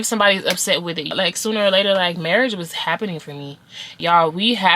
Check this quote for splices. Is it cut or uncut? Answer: cut